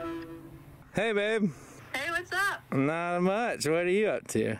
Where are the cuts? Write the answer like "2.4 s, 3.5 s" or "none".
none